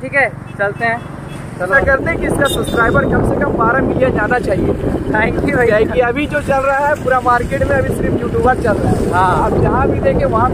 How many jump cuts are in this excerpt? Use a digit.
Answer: 1